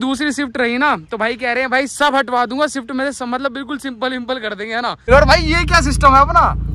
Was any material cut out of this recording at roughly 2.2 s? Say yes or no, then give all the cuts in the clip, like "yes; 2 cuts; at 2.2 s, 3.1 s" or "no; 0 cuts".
no; 1 cut; at 5.1 s